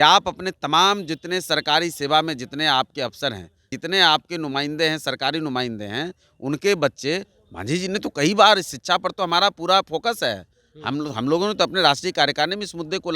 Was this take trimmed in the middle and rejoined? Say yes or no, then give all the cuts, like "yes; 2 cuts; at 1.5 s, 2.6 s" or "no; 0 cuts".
yes; 2 cuts; at 3.7 s, 7.3 s